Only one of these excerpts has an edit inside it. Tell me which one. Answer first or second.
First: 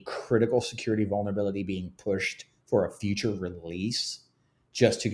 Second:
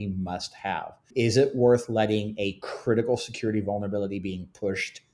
second